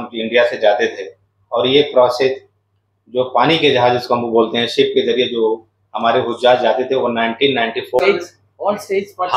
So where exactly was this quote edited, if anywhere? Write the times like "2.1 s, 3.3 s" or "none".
8.0 s